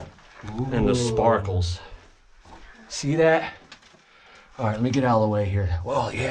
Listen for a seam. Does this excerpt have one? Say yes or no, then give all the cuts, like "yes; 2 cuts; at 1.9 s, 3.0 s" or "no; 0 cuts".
no; 0 cuts